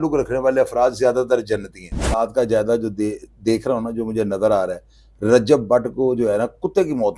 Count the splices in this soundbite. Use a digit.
1